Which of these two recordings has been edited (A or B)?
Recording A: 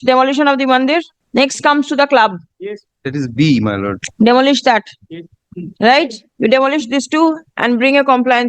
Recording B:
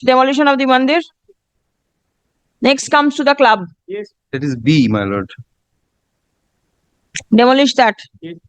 A